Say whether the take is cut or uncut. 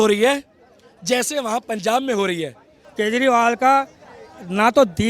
cut